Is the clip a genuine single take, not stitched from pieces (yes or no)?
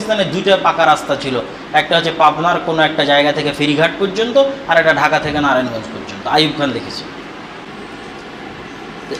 no